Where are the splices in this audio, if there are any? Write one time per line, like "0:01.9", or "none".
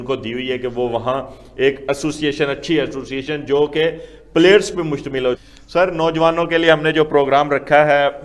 0:05.4